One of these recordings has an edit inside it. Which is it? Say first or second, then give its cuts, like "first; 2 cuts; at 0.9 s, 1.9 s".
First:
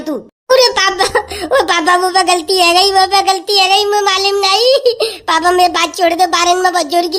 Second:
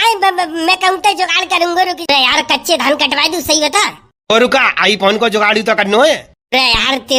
second; 1 cut; at 2.0 s